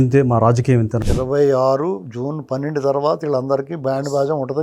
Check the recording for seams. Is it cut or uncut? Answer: cut